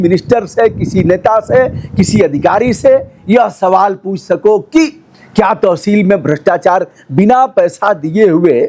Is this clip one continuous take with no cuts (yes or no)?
yes